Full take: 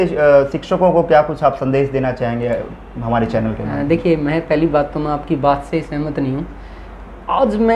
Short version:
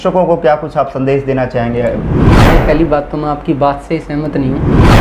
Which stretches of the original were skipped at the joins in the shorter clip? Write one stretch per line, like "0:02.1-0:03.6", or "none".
0:03.1-0:04.2